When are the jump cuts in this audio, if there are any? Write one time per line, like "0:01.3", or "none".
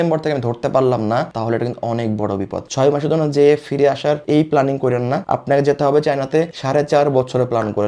0:02.7